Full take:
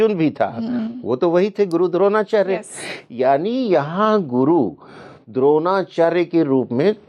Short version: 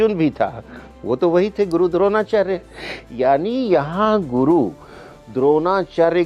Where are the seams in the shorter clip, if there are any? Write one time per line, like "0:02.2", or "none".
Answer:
none